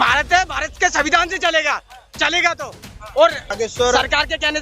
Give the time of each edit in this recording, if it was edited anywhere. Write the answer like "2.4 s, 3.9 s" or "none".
3.5 s